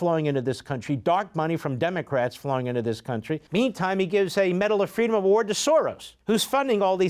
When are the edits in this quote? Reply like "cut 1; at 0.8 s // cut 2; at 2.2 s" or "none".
cut 1; at 3.4 s // cut 2; at 6.1 s